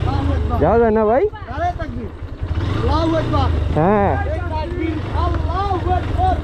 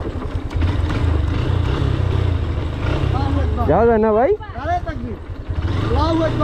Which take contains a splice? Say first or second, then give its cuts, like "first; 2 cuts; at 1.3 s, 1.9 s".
second; 1 cut; at 2.1 s